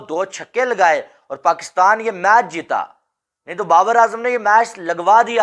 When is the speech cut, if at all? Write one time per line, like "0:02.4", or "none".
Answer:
none